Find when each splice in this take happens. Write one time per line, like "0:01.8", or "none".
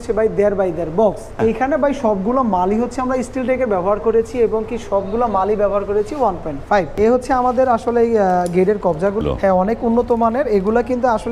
0:01.3
0:06.9
0:09.2